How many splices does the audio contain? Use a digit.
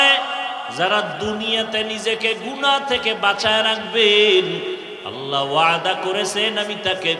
0